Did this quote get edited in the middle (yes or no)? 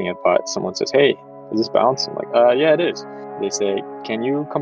yes